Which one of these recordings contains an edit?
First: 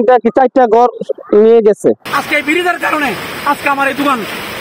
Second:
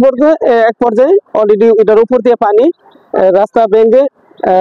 first; 1 cut; at 2.0 s

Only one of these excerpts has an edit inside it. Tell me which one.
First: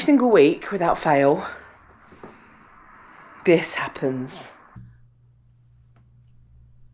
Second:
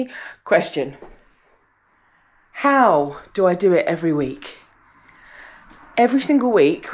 first; 1 cut; at 4.8 s

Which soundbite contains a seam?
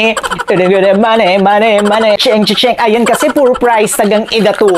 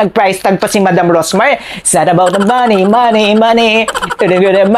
first; 1 cut; at 2.2 s

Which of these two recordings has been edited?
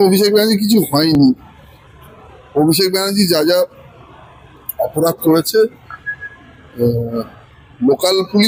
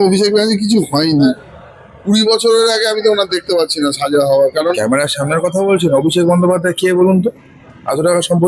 second; 2 cuts; at 1.2 s, 4.8 s

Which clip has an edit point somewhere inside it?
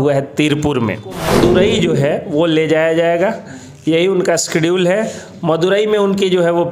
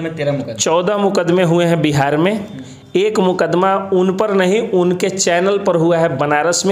first; 1 cut; at 1.3 s

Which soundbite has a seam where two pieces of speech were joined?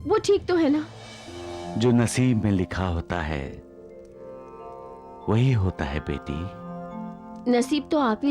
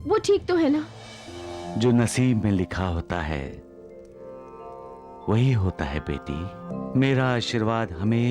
second; 1 cut; at 6.7 s

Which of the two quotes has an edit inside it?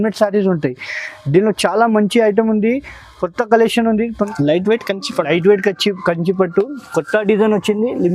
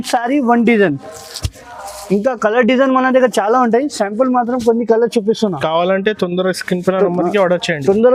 first; 1 cut; at 4.2 s

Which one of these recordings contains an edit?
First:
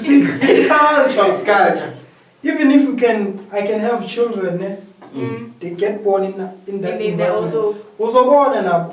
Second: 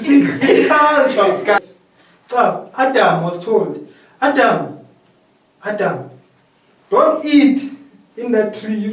second; 1 cut; at 1.6 s

